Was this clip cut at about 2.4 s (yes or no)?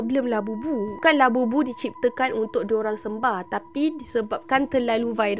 no